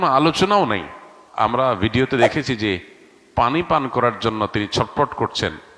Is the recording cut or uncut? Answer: cut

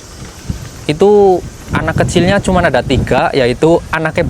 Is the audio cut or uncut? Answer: uncut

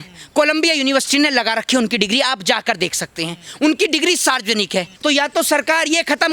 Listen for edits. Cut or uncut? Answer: cut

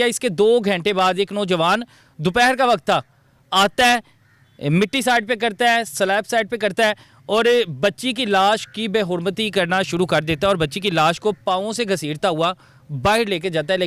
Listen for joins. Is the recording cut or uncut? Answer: uncut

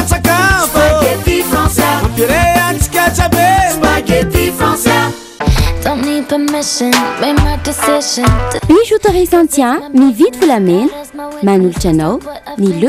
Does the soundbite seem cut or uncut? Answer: uncut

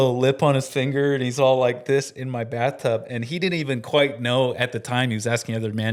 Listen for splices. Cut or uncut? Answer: uncut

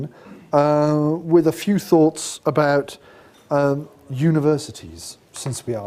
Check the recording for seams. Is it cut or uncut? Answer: uncut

